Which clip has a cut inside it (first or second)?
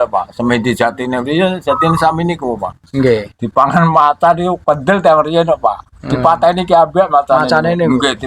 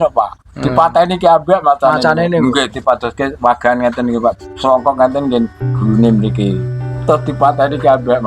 first